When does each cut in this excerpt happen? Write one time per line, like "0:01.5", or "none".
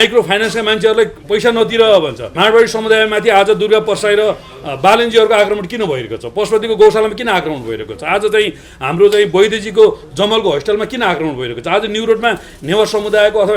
0:02.3